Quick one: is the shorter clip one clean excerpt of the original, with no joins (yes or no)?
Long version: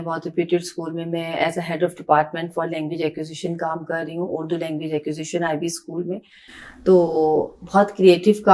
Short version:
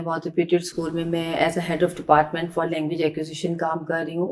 yes